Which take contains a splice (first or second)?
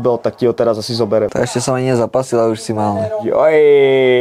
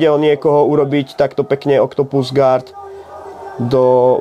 first